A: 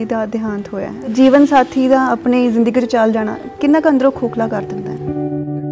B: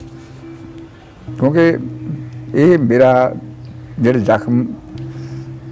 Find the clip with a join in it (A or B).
A